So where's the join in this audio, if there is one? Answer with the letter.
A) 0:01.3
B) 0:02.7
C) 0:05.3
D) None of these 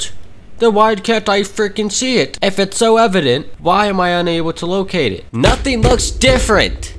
C